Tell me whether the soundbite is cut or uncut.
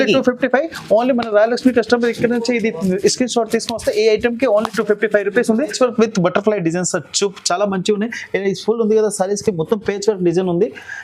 cut